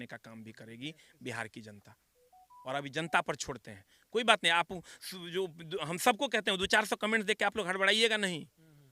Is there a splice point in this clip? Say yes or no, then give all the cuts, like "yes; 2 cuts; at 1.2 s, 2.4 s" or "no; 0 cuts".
no; 0 cuts